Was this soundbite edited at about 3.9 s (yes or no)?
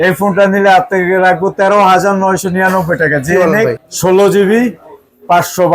yes